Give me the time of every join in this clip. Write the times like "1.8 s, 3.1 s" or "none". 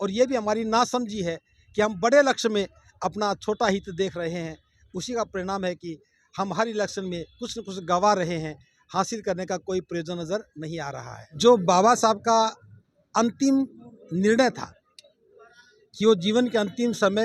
11.3 s